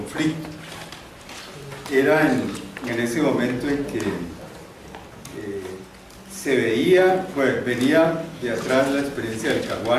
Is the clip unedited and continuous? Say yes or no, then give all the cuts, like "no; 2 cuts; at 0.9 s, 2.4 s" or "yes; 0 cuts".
no; 1 cut; at 3.8 s